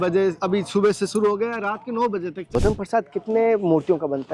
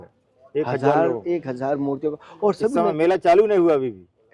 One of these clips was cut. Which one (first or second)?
first